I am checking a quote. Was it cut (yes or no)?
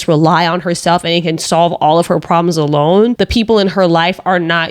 yes